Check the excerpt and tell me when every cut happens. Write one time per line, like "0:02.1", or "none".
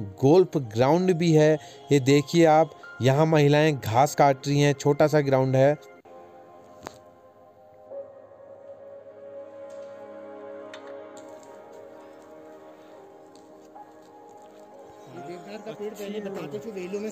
none